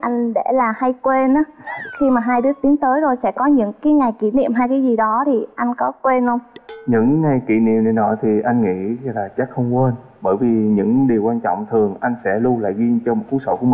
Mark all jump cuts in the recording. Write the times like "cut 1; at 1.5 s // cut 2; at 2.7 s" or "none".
none